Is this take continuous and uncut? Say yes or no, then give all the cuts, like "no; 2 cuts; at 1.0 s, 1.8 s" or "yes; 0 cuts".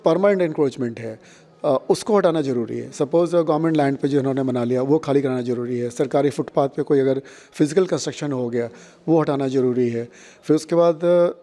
yes; 0 cuts